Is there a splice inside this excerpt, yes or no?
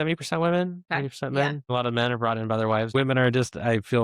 yes